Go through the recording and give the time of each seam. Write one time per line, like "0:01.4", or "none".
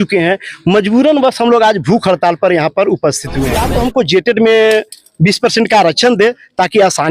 0:03.7